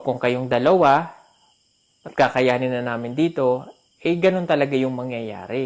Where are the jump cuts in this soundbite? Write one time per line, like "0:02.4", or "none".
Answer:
none